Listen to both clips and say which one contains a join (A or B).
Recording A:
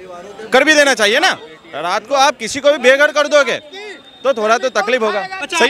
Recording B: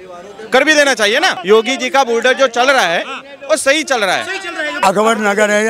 B